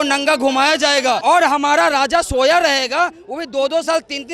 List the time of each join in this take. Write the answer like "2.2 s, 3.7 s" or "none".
1.2 s